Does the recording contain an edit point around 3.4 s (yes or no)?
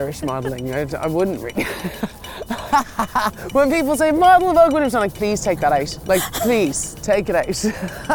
yes